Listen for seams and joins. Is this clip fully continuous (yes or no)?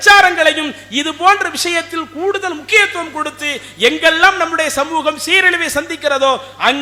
yes